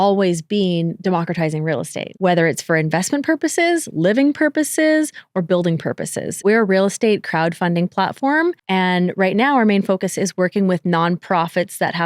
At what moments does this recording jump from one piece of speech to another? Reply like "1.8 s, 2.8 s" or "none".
2.1 s, 6.4 s, 8.6 s